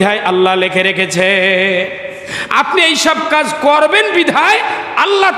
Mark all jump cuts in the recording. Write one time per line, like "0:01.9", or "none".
none